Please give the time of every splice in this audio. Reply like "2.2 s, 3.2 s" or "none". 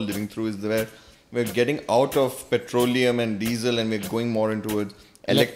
none